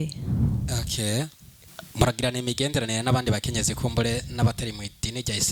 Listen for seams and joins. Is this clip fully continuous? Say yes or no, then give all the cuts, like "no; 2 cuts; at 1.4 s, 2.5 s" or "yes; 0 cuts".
yes; 0 cuts